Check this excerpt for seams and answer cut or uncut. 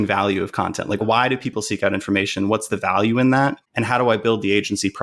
cut